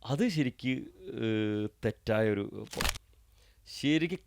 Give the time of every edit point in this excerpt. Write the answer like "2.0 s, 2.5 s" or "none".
2.8 s